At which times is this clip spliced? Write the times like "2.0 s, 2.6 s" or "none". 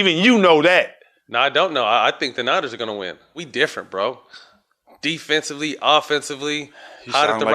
3.4 s